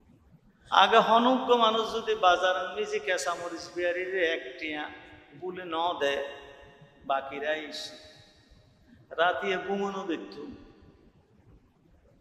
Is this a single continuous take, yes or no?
yes